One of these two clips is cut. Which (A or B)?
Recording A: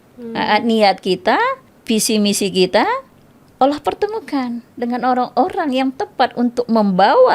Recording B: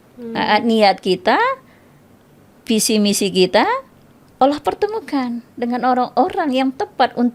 A